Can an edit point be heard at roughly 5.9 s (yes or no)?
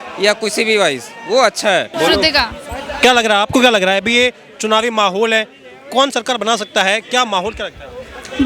no